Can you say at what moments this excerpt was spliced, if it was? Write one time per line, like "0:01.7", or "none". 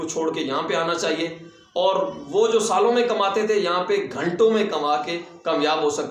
none